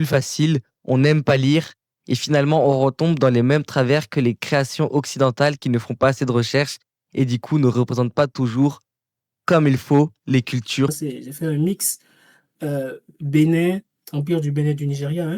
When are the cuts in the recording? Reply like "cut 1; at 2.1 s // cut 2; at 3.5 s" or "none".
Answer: cut 1; at 10.9 s